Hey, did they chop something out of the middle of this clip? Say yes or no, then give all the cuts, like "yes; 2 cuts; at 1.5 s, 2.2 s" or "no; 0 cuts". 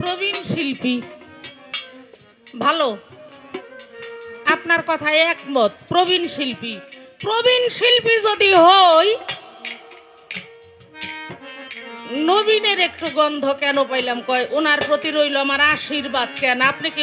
no; 0 cuts